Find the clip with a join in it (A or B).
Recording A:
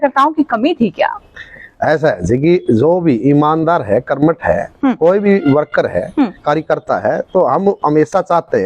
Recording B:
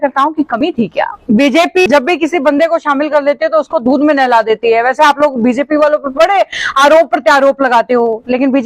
B